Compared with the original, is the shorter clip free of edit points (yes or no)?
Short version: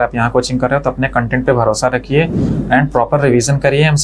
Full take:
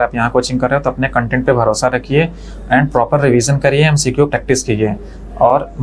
yes